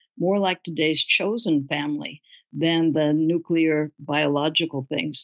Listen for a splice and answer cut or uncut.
uncut